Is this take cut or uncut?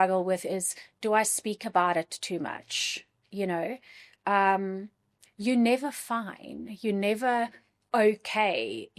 uncut